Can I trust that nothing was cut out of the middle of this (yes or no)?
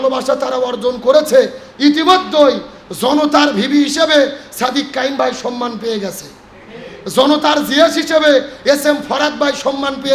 yes